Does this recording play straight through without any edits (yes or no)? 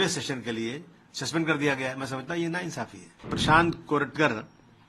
no